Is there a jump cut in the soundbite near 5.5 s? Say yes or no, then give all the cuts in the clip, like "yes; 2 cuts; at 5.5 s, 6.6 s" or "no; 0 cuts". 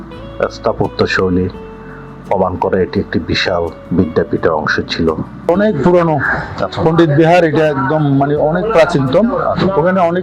yes; 1 cut; at 5.5 s